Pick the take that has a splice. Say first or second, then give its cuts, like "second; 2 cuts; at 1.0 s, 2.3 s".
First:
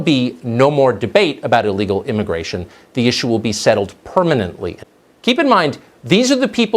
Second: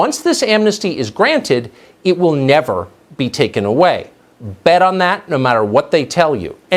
first; 1 cut; at 4.7 s